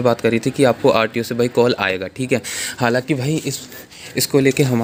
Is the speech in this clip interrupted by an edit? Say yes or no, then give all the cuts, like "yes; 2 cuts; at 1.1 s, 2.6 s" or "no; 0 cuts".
no; 0 cuts